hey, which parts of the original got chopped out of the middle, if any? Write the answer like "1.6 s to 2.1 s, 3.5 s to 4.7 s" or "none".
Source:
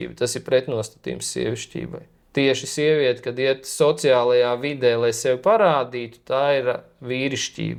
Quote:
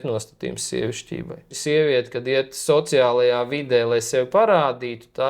2.2 s to 2.7 s